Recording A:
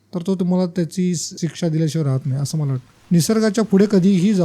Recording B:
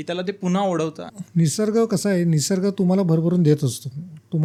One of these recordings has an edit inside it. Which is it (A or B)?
A